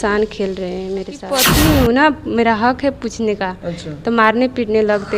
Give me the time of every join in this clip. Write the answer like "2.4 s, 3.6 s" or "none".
1.5 s